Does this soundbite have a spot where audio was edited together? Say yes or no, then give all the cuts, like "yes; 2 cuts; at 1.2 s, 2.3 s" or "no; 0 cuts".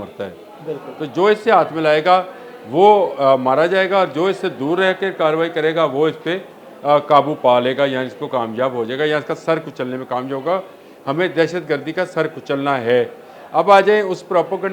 no; 0 cuts